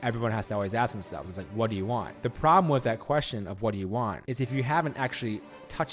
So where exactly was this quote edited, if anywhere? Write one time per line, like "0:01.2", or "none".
0:02.1
0:04.2